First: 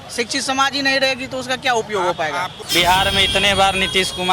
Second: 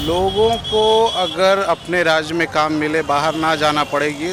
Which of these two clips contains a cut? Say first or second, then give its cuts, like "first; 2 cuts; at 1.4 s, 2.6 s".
first; 1 cut; at 2.6 s